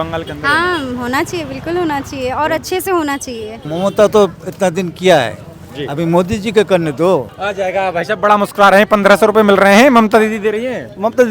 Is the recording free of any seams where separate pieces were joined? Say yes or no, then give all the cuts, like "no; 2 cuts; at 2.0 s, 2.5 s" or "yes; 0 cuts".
no; 2 cuts; at 3.6 s, 7.3 s